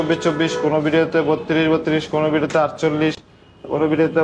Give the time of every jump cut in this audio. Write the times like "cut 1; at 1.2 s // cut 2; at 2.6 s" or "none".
none